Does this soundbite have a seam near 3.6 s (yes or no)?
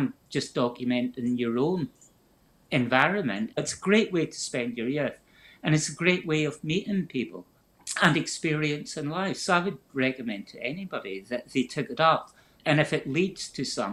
yes